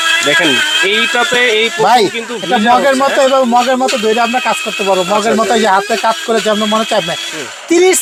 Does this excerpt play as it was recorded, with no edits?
yes; 0 cuts

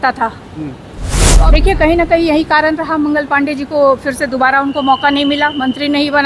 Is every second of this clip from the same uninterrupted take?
no; 1 cut; at 1.3 s

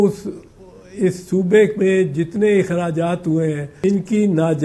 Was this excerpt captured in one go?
no; 1 cut; at 3.7 s

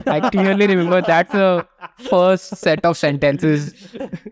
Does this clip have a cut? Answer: no; 0 cuts

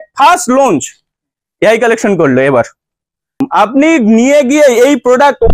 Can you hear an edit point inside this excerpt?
yes; 1 cut; at 3.4 s

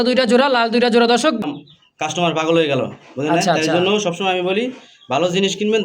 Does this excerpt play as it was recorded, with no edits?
no; 1 cut; at 1.4 s

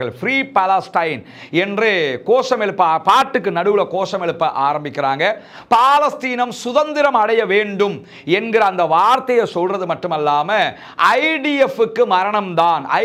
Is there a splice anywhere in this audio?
no; 0 cuts

